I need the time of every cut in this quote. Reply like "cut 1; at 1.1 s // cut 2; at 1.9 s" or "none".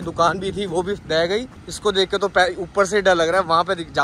none